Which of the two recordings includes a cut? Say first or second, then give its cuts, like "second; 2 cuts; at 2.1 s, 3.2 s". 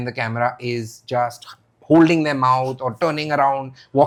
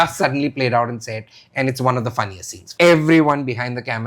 second; 1 cut; at 2.7 s